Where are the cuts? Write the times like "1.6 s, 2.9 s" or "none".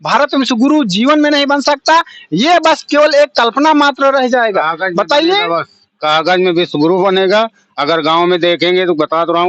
none